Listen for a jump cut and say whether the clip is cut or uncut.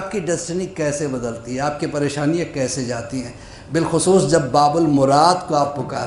uncut